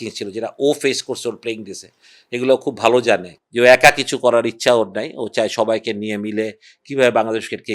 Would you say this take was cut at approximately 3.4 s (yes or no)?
yes